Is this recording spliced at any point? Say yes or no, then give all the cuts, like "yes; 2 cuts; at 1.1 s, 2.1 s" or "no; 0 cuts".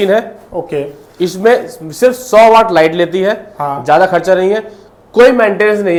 no; 0 cuts